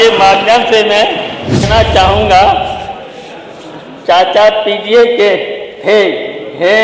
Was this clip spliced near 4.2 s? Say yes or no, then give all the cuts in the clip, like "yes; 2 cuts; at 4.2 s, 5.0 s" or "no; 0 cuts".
no; 1 cut; at 1.7 s